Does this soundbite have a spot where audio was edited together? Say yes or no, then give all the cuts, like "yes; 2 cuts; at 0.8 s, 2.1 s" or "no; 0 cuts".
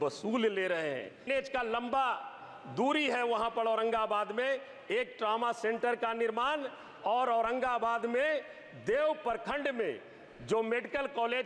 yes; 1 cut; at 1.3 s